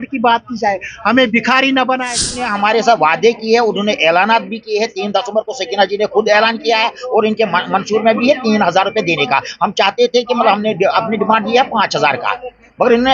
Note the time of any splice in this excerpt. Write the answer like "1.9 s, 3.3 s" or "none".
2.5 s